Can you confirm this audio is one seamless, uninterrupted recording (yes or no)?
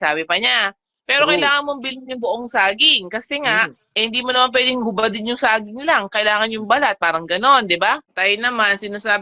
no